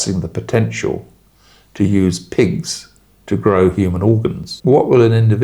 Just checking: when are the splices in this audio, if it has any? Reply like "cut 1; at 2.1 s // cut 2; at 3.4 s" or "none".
cut 1; at 4.5 s